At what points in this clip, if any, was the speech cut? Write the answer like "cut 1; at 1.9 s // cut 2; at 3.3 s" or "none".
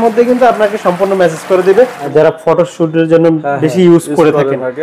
cut 1; at 2.1 s